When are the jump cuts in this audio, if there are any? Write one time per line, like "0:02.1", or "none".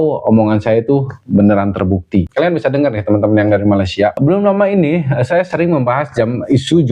0:02.3
0:04.2